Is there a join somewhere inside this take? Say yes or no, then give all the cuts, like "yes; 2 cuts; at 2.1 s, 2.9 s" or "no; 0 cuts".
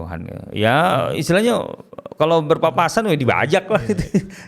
no; 0 cuts